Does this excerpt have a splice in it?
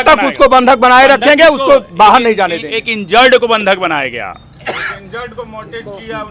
no; 0 cuts

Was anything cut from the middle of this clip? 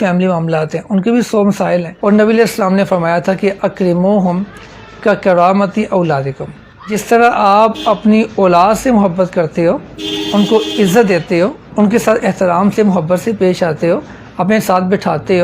yes; 3 cuts; at 1.9 s, 7.0 s, 11.6 s

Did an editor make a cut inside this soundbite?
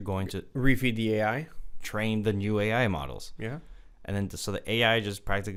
no; 0 cuts

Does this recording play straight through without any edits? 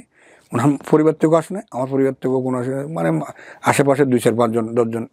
yes; 0 cuts

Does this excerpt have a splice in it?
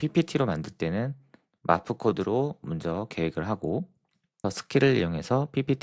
yes; 1 cut; at 4.4 s

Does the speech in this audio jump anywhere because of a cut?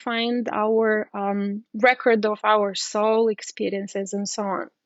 no; 0 cuts

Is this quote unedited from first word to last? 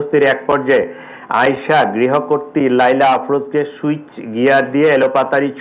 yes; 0 cuts

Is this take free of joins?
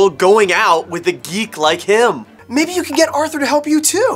no; 1 cut; at 2.3 s

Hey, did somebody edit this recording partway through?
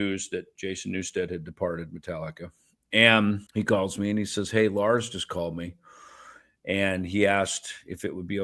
yes; 1 cut; at 3.4 s

